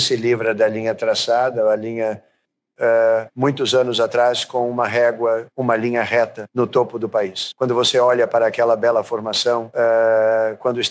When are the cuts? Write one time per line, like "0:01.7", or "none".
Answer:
none